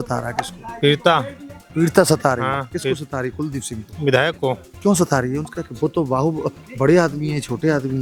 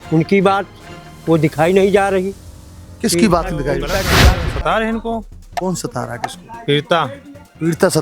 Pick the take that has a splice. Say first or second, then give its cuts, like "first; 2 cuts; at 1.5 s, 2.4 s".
second; 1 cut; at 4.1 s